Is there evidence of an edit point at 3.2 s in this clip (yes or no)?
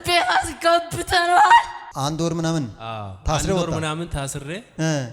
no